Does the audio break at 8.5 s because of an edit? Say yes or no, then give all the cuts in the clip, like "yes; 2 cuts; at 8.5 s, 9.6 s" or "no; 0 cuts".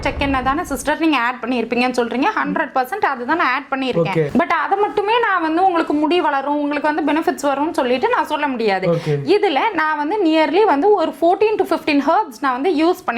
no; 0 cuts